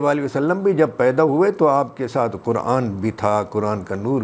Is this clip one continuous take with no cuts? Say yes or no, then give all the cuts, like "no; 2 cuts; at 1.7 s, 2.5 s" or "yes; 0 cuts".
yes; 0 cuts